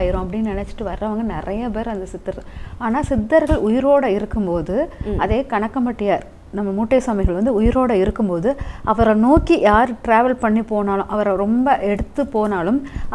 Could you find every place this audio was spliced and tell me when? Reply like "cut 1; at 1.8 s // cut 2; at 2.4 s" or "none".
none